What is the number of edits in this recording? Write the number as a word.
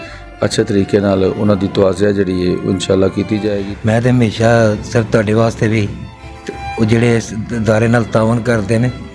one